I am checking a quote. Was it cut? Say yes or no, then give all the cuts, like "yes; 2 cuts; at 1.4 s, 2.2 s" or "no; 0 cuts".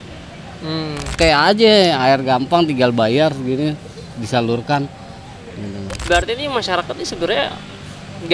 yes; 2 cuts; at 1.1 s, 6.1 s